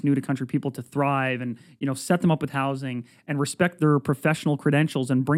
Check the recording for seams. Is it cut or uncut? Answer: uncut